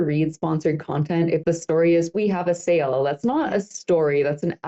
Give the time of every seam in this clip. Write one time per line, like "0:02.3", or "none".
0:01.4